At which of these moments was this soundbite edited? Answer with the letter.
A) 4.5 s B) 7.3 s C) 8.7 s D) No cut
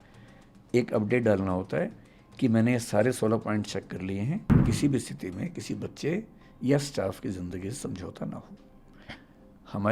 A